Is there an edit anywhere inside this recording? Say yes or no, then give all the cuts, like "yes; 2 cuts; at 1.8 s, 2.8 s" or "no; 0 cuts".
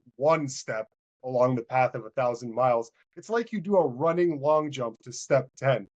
no; 0 cuts